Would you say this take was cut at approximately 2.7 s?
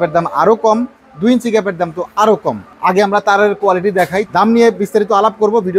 yes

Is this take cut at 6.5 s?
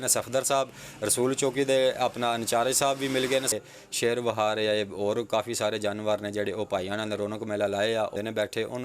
no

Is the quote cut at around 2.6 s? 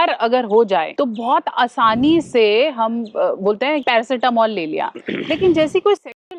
no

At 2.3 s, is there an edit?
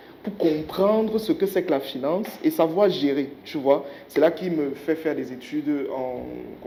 no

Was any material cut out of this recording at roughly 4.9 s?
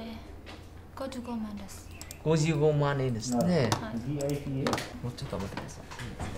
yes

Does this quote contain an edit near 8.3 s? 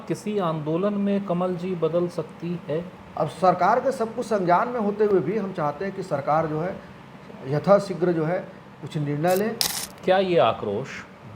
no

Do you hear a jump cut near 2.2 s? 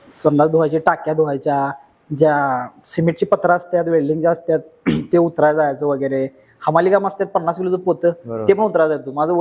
no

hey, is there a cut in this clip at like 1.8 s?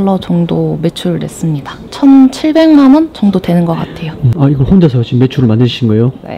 yes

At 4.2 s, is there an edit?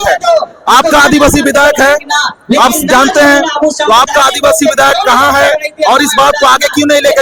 no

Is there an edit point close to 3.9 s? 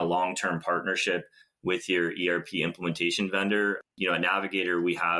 yes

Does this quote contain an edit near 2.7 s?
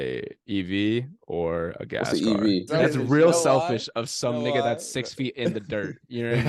yes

